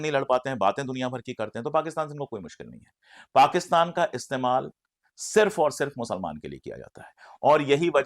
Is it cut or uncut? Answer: uncut